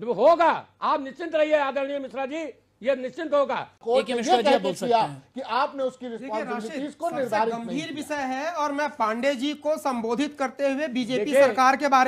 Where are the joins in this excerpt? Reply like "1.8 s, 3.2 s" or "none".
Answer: 3.8 s